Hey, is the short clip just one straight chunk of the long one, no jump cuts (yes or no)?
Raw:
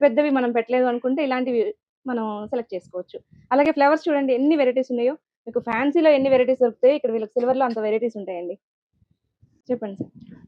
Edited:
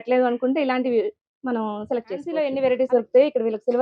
no